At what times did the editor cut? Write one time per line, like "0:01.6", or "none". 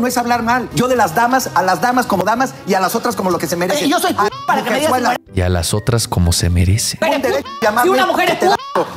0:02.2
0:07.0